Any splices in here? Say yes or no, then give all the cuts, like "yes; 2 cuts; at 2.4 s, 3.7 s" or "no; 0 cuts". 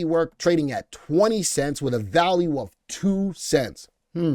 no; 0 cuts